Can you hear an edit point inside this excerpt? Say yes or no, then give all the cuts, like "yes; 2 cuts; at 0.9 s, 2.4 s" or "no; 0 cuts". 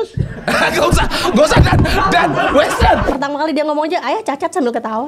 yes; 1 cut; at 3.1 s